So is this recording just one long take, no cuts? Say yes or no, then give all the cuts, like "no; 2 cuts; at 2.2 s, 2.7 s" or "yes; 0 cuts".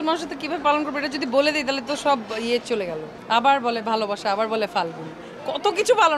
no; 1 cut; at 3.1 s